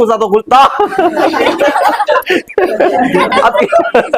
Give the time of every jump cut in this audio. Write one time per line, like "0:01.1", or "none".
none

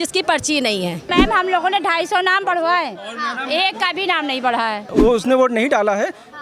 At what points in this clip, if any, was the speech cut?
0:01.1
0:04.9

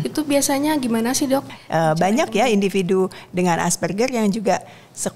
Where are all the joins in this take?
0:01.5

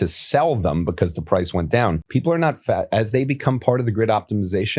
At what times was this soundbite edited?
0:02.0

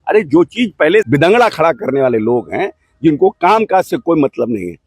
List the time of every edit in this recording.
0:01.1

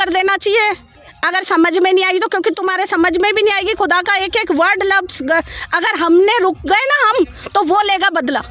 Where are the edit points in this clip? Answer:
none

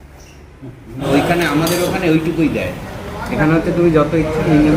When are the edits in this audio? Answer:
0:01.0

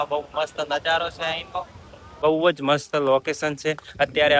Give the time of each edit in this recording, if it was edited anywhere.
0:02.2

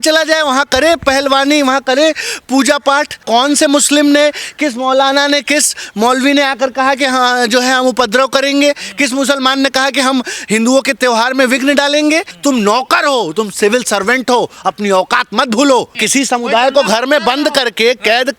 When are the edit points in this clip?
0:03.2
0:12.3
0:16.0

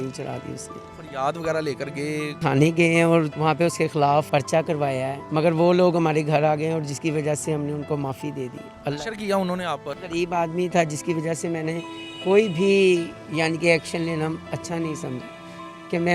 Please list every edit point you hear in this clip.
0:00.9
0:02.4
0:03.3
0:04.3
0:05.2
0:10.0

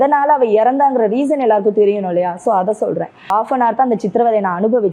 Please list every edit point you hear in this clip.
0:03.3

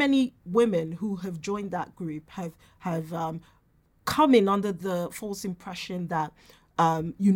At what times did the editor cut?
none

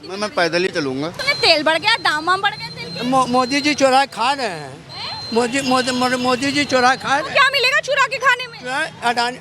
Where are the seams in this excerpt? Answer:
0:01.2

